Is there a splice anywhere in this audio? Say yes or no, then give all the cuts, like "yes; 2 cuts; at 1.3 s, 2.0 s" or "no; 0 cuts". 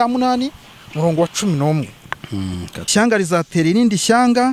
yes; 1 cut; at 2.9 s